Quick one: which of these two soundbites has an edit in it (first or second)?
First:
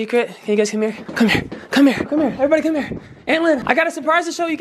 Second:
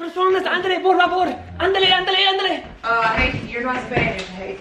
first